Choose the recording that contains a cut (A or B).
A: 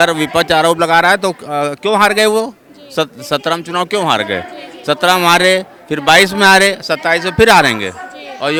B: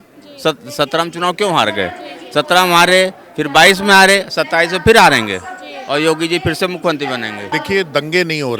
B